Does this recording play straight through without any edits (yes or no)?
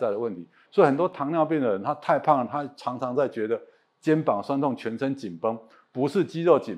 yes